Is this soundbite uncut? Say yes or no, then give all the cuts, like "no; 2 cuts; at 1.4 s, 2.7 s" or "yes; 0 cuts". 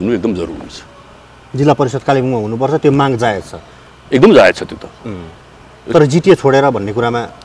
yes; 0 cuts